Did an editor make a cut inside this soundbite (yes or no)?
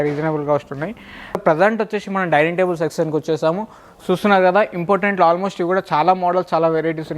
yes